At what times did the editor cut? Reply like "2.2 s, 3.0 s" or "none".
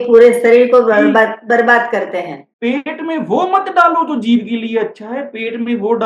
2.4 s